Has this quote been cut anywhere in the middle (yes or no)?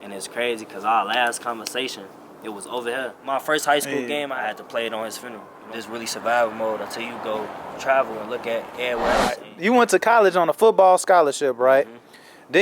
yes